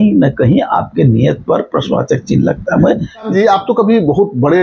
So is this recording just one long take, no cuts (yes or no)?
no